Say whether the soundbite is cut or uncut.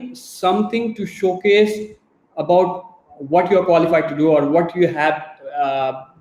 uncut